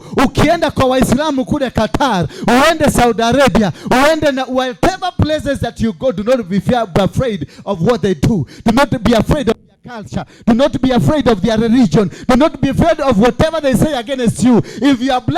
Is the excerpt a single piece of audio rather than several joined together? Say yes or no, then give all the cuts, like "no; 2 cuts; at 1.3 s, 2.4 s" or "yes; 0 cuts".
yes; 0 cuts